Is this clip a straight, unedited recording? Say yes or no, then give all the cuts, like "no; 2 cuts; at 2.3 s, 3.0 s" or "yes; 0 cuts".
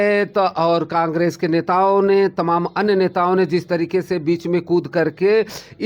yes; 0 cuts